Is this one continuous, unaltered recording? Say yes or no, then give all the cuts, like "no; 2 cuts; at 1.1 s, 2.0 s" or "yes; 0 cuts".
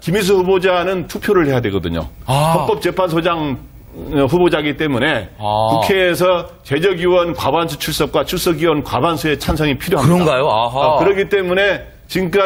yes; 0 cuts